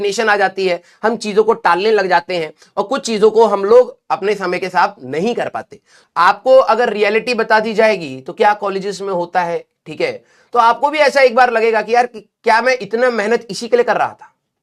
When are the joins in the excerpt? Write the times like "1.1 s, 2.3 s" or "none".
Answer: 5.9 s